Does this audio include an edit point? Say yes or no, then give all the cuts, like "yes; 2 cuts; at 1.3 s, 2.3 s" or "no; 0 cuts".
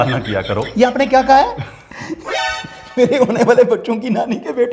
no; 0 cuts